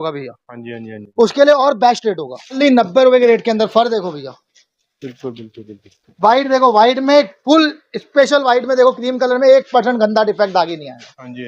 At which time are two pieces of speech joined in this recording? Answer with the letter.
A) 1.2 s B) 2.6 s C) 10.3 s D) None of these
B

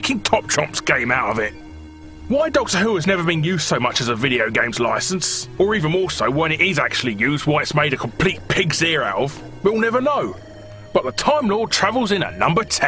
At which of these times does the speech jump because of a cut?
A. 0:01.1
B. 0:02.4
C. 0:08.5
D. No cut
D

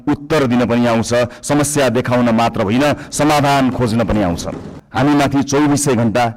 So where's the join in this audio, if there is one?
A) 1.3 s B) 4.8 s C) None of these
B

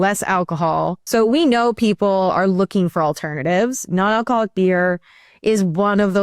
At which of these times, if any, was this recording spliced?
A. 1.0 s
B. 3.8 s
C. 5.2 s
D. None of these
A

